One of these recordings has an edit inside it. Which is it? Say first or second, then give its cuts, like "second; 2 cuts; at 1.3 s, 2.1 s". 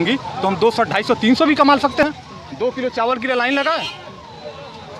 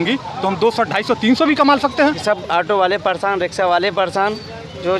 second; 1 cut; at 2.2 s